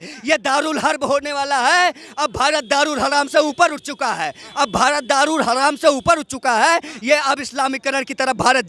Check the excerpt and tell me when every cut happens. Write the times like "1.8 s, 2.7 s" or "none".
none